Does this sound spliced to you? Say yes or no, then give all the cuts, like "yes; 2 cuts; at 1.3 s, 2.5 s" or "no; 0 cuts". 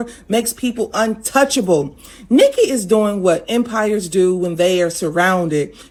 no; 0 cuts